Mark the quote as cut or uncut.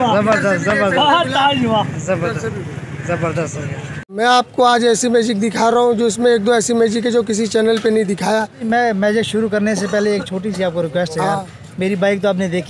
cut